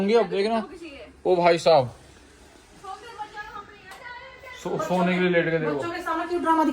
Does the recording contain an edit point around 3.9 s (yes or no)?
yes